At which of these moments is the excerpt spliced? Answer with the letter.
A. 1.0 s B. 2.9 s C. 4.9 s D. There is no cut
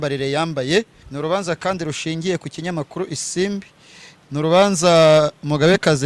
A